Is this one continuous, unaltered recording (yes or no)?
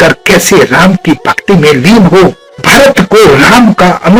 no